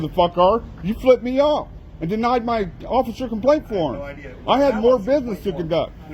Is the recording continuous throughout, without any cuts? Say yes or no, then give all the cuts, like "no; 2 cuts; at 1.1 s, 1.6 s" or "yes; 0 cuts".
yes; 0 cuts